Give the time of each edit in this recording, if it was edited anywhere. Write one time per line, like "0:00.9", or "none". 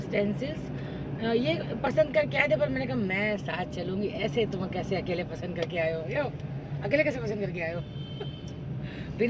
none

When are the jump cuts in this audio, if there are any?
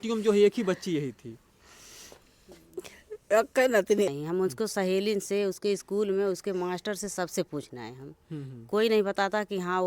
0:04.1

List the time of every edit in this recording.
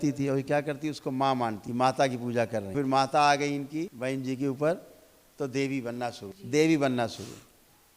0:01.6
0:02.7
0:03.9
0:06.3

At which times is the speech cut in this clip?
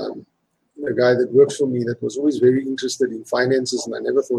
none

